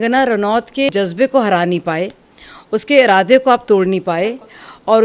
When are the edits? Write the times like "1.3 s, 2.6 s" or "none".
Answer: 0.9 s